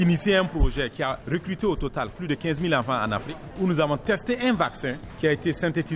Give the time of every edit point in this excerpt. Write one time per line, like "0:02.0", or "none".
0:01.2
0:02.1
0:03.4
0:05.0